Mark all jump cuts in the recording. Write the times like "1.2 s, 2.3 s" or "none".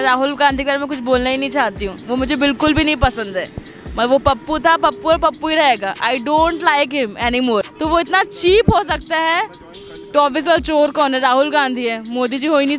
7.7 s

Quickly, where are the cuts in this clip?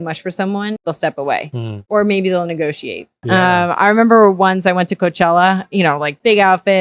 0.8 s, 1.7 s, 3.1 s

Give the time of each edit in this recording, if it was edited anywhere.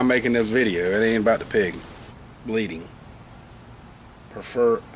none

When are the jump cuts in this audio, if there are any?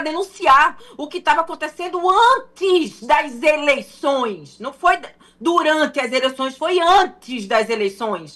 none

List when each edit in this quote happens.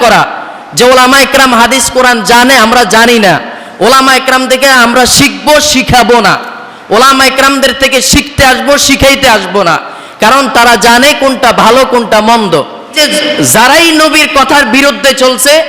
12.9 s

